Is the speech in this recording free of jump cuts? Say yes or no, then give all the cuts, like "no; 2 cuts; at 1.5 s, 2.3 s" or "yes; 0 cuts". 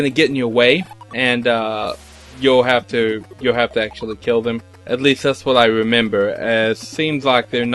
no; 2 cuts; at 1.0 s, 4.7 s